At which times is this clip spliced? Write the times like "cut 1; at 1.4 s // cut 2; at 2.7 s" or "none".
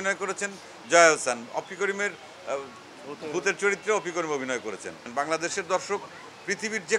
cut 1; at 5.1 s